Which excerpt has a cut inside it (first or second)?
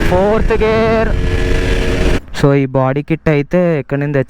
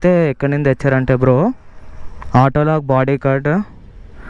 first